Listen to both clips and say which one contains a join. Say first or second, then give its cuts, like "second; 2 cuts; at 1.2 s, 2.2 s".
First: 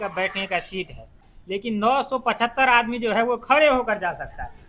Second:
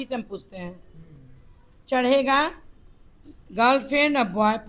first; 1 cut; at 1.3 s